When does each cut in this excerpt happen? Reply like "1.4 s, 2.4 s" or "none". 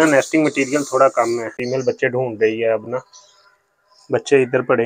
1.5 s